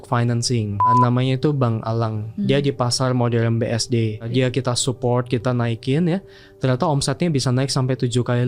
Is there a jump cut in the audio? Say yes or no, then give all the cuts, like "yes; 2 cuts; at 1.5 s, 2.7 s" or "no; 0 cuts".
yes; 2 cuts; at 0.9 s, 4.3 s